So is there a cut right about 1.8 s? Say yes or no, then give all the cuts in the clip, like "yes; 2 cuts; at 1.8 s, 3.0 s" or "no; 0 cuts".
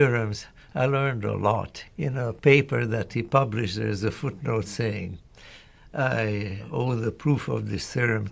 yes; 2 cuts; at 1.8 s, 6.7 s